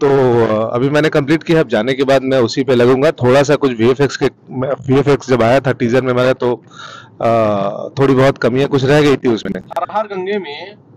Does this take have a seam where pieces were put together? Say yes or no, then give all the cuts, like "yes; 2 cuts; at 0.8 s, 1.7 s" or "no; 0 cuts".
yes; 1 cut; at 9.6 s